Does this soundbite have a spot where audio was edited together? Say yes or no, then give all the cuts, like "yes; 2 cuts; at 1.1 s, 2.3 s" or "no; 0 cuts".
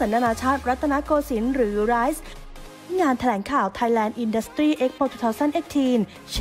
yes; 1 cut; at 2.6 s